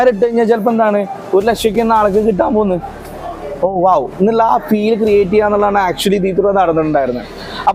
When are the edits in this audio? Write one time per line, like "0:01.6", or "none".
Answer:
none